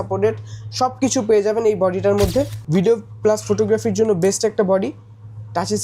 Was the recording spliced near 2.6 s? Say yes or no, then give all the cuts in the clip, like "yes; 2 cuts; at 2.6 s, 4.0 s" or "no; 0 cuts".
yes; 1 cut; at 2.6 s